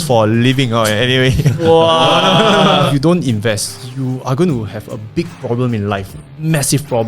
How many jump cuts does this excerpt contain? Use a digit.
1